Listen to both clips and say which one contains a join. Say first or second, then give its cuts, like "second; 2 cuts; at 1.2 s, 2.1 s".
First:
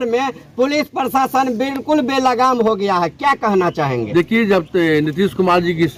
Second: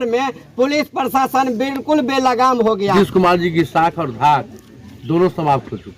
second; 1 cut; at 2.9 s